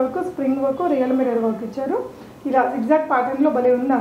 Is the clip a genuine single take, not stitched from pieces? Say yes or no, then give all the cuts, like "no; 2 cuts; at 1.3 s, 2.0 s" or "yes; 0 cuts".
yes; 0 cuts